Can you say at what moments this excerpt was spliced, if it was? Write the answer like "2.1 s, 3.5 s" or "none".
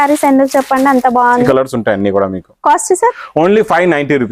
1.5 s

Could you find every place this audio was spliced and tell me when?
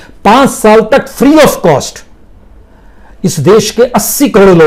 none

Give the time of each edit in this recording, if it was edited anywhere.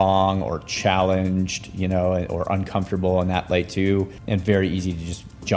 4.2 s

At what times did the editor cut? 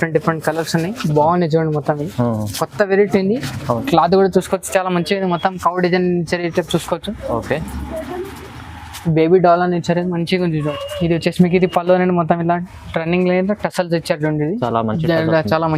3.5 s, 10.5 s

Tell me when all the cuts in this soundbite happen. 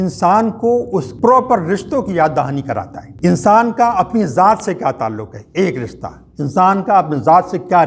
1.1 s, 3.0 s

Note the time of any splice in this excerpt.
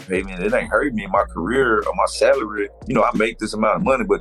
2.7 s

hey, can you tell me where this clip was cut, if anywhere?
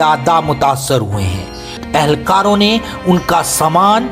1.8 s

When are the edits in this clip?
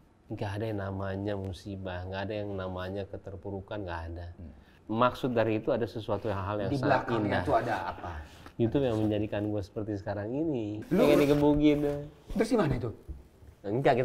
4.7 s, 10.8 s

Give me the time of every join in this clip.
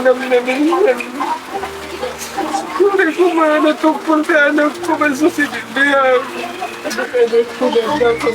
7.0 s

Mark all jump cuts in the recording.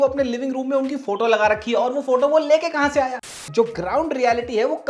3.2 s

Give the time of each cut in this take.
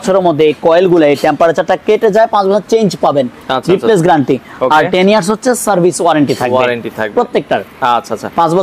none

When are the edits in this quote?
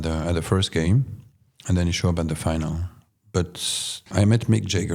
4.0 s

